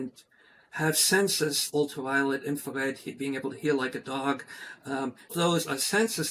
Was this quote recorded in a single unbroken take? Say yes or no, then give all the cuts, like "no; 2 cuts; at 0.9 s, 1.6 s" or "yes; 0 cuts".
no; 2 cuts; at 1.6 s, 5.3 s